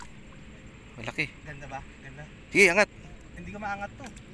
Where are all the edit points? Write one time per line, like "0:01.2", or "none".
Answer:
none